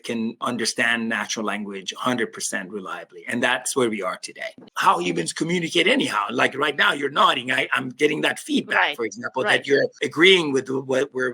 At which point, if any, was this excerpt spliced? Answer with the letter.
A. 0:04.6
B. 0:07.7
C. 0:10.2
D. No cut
A